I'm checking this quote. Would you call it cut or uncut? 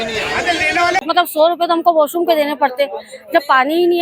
cut